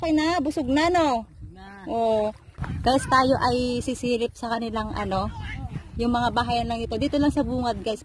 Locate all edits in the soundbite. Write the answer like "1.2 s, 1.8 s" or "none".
2.5 s